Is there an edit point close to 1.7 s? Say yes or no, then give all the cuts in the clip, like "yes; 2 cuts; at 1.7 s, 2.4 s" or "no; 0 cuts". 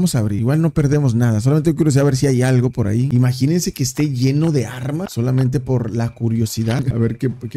no; 1 cut; at 5.1 s